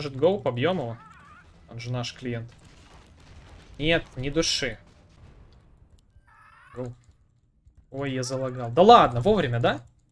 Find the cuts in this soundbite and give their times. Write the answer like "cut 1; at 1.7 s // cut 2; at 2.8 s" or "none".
cut 1; at 5.2 s